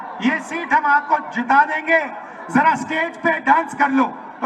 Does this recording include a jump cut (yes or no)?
no